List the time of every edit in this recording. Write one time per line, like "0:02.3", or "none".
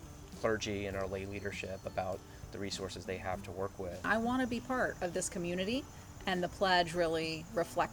0:04.0